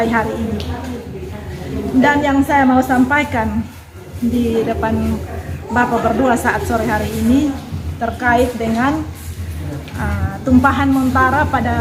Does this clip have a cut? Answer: no; 0 cuts

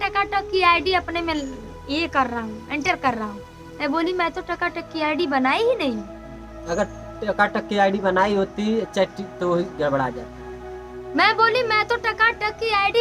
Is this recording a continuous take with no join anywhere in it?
yes; 0 cuts

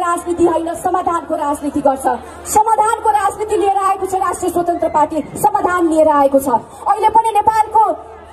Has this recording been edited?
no; 0 cuts

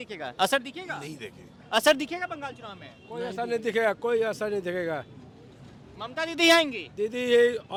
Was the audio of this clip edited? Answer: no; 0 cuts

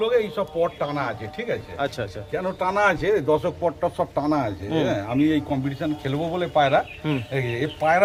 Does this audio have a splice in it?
no; 0 cuts

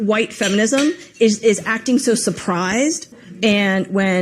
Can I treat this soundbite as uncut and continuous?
no; 1 cut; at 3.1 s

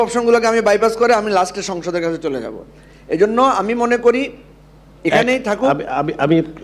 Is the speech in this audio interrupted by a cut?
no; 0 cuts

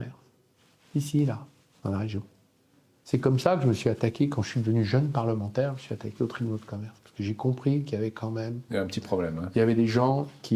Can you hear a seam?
no; 0 cuts

